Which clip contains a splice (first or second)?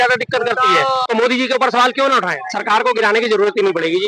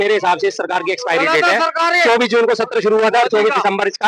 first